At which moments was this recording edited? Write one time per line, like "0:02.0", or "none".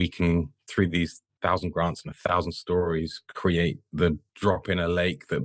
0:01.3
0:04.3